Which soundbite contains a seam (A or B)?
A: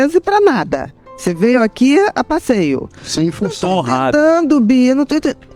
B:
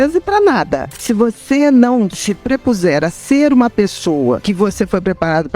B